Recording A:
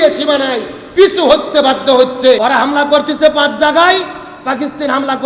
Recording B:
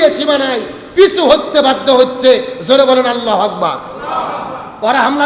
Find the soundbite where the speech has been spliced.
A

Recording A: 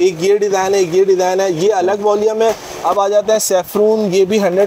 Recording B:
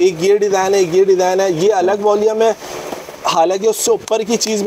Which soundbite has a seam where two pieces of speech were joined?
A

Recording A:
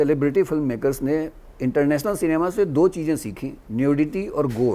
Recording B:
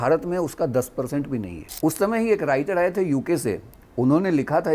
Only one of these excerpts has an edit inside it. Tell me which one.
B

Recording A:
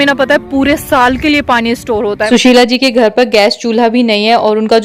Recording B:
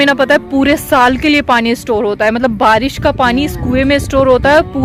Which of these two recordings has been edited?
A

